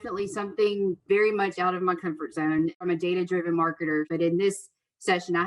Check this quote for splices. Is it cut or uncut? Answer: cut